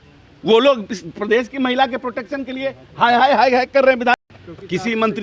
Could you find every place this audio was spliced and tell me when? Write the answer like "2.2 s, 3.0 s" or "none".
4.1 s

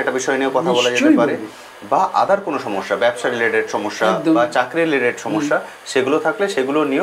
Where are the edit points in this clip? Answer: none

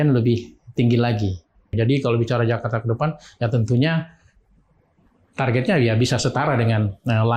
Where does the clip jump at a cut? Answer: 1.7 s

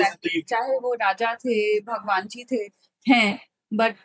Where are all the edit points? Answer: none

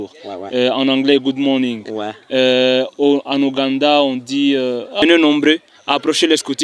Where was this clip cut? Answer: 5.0 s

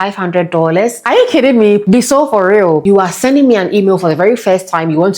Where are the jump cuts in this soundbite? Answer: 1.0 s, 1.8 s, 2.8 s

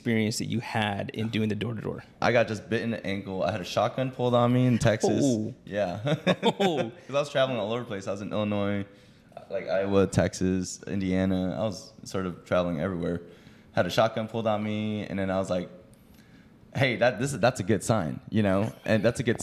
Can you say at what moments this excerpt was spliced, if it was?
2.2 s

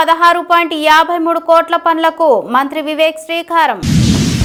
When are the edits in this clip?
none

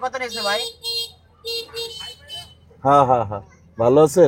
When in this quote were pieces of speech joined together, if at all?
none

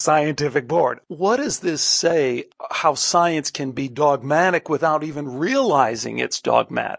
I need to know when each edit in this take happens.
1.0 s, 2.4 s

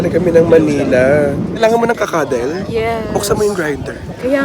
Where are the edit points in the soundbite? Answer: 1.5 s

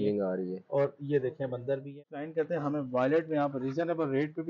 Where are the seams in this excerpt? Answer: 1.9 s

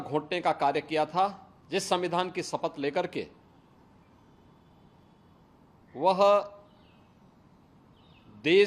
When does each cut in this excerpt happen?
1.5 s

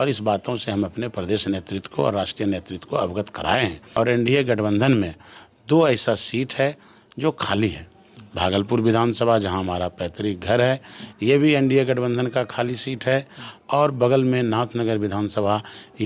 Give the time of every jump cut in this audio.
3.8 s

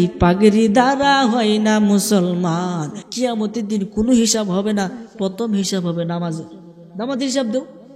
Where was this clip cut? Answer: 3.0 s

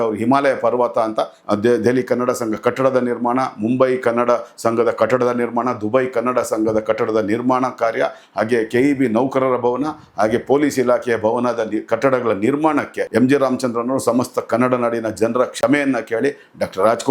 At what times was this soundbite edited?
1.4 s, 13.0 s

